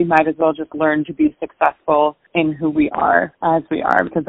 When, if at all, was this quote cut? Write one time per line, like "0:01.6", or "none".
0:02.2
0:03.3

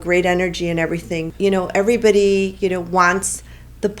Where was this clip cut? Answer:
0:01.3

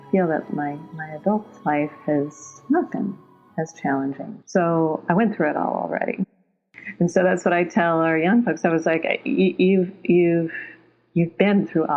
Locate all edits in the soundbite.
0:06.4

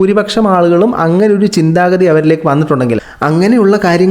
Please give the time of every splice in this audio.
0:03.0

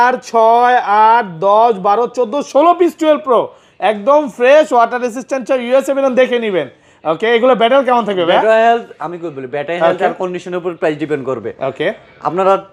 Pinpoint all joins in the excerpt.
none

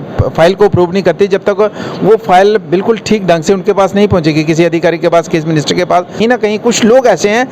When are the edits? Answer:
0:06.2

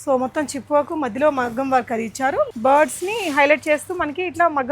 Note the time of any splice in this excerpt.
0:02.5

